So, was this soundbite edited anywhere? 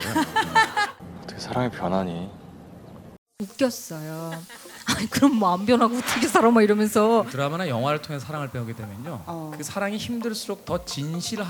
yes; 3 cuts; at 1.0 s, 3.4 s, 7.3 s

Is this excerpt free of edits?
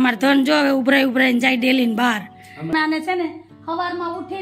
no; 1 cut; at 2.7 s

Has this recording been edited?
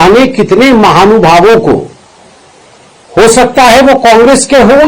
no; 0 cuts

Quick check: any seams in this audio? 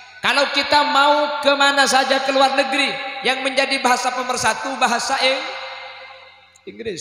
no; 0 cuts

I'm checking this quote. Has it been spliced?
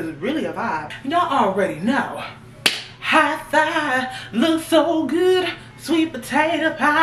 yes; 1 cut; at 0.9 s

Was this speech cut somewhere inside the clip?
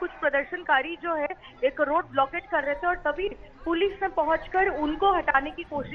no; 0 cuts

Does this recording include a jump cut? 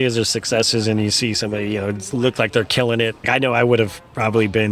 yes; 1 cut; at 3.3 s

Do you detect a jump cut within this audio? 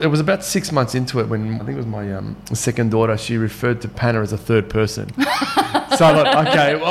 yes; 1 cut; at 1.6 s

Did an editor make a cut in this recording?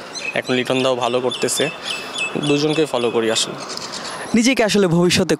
no; 0 cuts

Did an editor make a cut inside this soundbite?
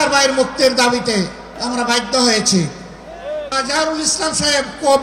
yes; 2 cuts; at 1.5 s, 3.5 s

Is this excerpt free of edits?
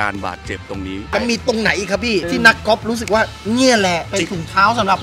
no; 3 cuts; at 1.1 s, 2.4 s, 4.1 s

